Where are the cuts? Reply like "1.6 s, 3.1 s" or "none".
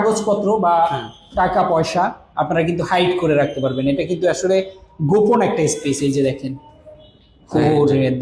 none